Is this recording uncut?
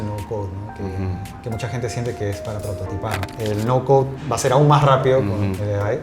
no; 1 cut; at 3.3 s

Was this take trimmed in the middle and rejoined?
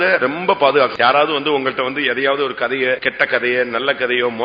yes; 2 cuts; at 0.9 s, 3.1 s

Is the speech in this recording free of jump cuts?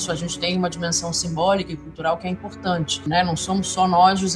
no; 1 cut; at 3.1 s

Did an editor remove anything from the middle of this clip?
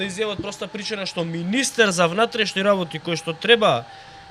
no; 0 cuts

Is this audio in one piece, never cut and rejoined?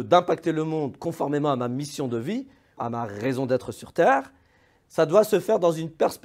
no; 1 cut; at 2.8 s

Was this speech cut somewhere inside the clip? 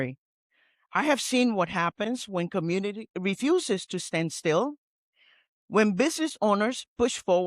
yes; 1 cut; at 3.1 s

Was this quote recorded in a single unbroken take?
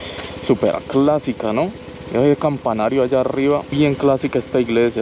no; 1 cut; at 3.7 s

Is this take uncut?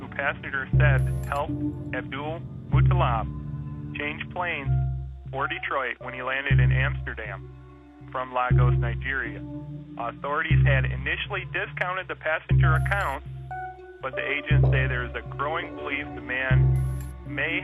no; 1 cut; at 8.4 s

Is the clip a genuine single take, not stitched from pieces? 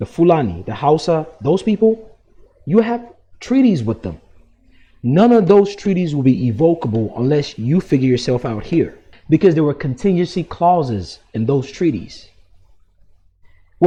yes; 0 cuts

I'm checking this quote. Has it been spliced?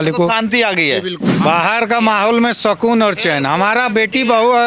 yes; 1 cut; at 1.3 s

